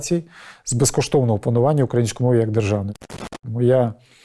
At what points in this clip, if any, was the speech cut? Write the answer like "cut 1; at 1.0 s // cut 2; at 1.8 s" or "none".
cut 1; at 3.1 s